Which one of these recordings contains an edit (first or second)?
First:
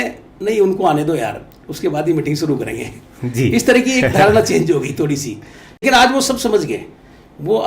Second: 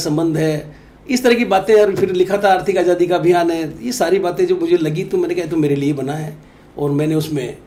first